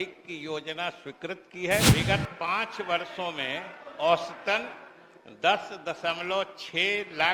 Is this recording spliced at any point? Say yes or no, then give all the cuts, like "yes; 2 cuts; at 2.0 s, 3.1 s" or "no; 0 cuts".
yes; 1 cut; at 1.9 s